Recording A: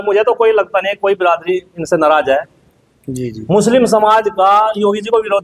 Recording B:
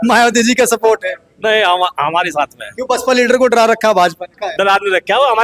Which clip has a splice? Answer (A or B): B